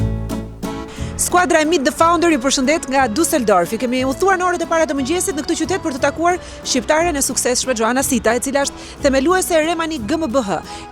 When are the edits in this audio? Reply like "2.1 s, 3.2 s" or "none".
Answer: 1.2 s